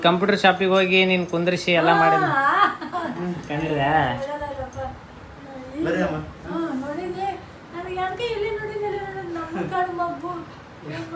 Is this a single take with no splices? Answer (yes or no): yes